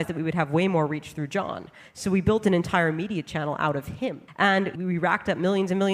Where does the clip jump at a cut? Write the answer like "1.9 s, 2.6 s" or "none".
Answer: 4.7 s